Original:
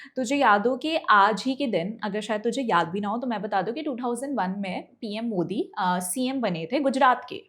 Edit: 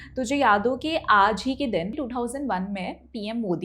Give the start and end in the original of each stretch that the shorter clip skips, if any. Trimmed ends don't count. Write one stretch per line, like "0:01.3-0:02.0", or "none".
0:01.9-0:03.8

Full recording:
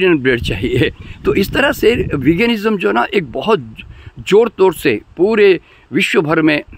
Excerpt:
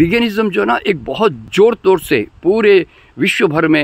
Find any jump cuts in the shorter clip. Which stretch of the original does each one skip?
0:03.7-0:04.2

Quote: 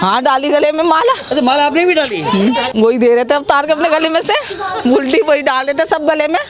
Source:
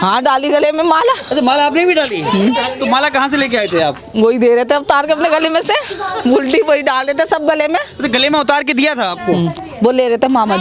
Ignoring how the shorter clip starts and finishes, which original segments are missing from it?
0:02.7-0:04.1

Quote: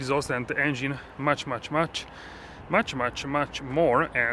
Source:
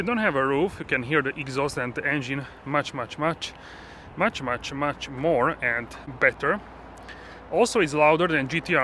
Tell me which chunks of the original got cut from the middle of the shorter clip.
none

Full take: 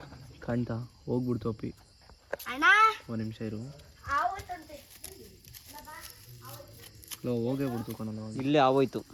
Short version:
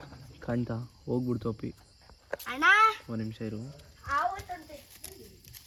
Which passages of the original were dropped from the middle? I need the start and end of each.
none

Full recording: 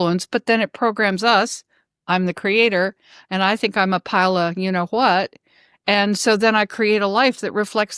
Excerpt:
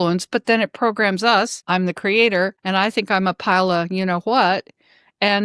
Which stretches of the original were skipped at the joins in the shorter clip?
0:01.6-0:02.0
0:03.0-0:03.3

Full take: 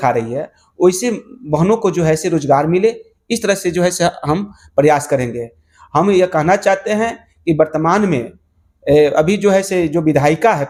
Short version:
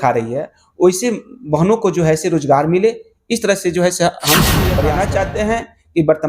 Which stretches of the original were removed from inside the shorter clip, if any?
0:04.8-0:06.3

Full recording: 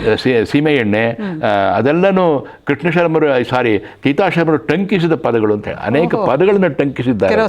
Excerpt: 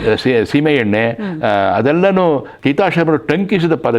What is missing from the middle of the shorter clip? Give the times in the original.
0:02.5-0:03.9

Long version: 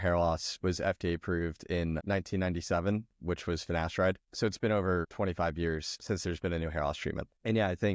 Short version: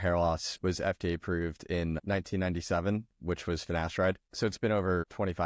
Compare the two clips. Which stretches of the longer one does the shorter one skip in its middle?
none

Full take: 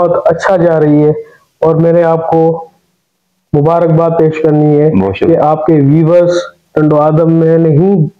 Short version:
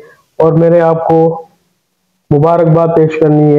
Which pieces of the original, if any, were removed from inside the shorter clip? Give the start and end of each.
none

